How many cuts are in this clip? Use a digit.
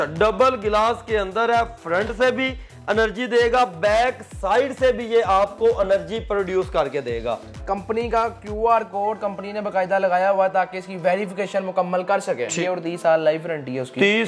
2